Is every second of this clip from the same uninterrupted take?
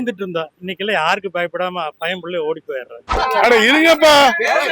no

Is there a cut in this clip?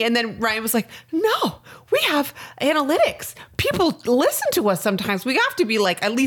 no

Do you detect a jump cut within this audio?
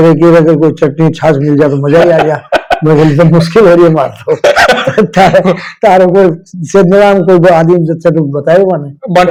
no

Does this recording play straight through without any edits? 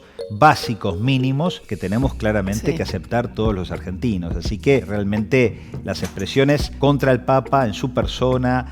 no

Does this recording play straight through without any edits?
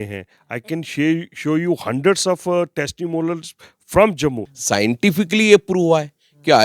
no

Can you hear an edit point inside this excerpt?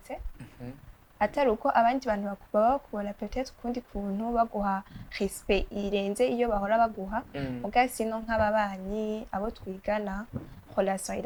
no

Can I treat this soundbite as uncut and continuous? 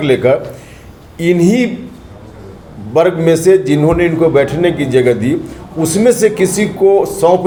yes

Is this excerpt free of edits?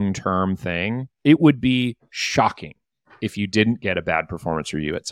no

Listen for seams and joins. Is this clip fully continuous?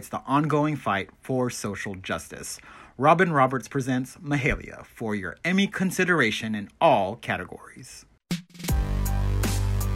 no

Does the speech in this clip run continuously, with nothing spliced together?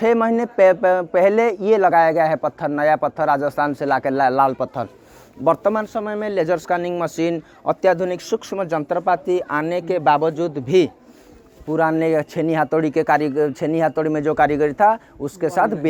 yes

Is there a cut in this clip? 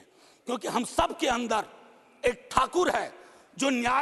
no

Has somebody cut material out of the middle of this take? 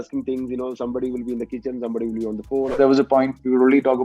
yes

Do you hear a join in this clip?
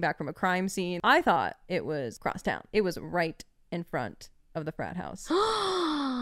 yes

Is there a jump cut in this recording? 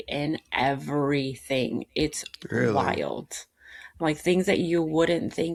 no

